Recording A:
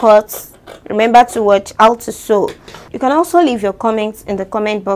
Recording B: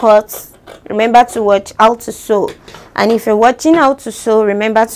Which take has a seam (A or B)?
A